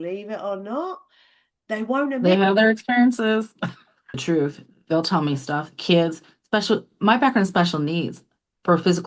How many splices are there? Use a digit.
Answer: 1